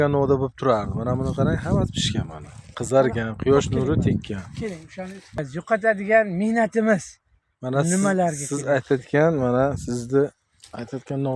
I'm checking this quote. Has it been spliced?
yes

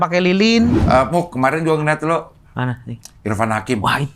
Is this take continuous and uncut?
no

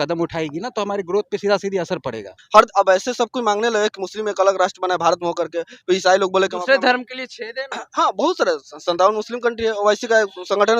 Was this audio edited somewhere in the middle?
yes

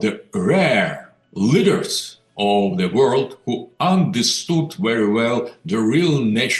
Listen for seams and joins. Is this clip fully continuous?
yes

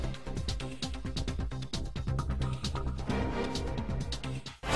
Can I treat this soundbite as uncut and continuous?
yes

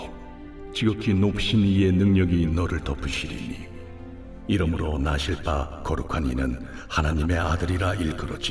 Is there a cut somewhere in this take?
no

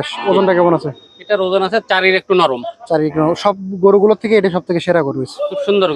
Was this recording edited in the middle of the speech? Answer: no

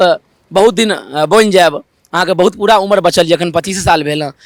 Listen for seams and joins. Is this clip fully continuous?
yes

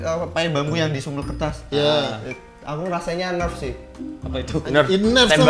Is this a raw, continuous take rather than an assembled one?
yes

